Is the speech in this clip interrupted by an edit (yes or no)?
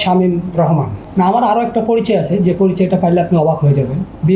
yes